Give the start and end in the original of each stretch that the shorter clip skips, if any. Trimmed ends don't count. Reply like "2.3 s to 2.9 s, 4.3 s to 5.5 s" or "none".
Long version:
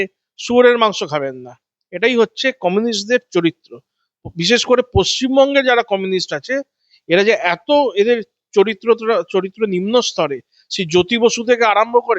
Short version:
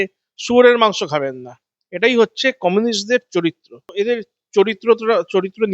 3.9 s to 7.9 s

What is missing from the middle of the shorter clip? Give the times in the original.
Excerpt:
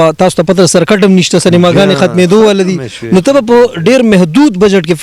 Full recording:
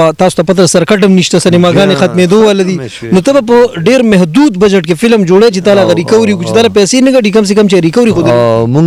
none

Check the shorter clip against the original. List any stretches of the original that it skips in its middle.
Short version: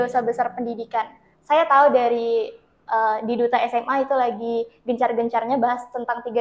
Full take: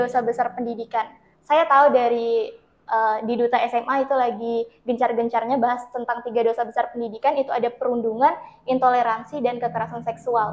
none

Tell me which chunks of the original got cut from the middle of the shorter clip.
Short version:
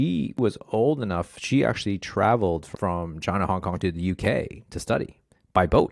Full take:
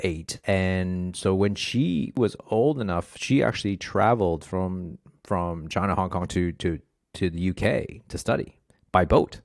4.4 s to 5.1 s, 6.3 s to 7.2 s

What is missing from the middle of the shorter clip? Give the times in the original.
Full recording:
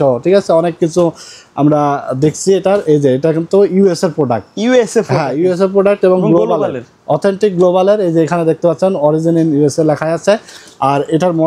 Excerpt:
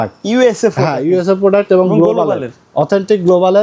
none

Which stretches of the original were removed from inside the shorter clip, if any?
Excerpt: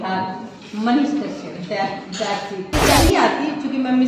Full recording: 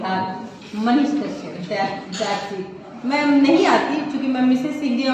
3.0 s to 3.5 s

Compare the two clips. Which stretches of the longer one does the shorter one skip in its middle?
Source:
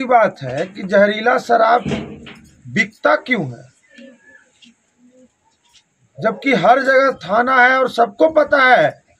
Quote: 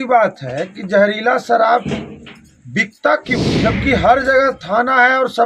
3.5 s to 6.1 s

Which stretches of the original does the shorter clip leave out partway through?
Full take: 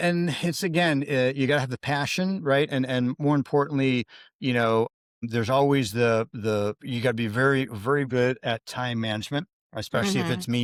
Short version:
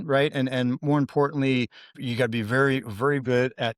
4.3 s to 6.8 s

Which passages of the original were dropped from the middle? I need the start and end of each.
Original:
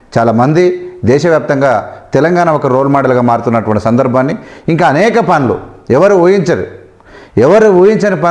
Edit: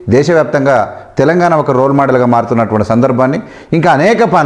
none

